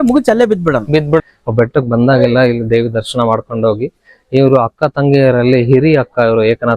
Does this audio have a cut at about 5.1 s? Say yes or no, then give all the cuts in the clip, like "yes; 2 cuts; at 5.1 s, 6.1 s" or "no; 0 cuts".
no; 1 cut; at 1.2 s